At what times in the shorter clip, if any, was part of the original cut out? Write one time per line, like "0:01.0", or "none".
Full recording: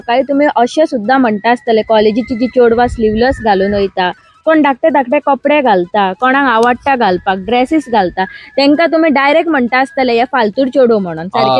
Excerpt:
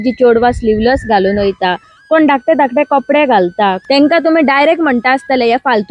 0:03.8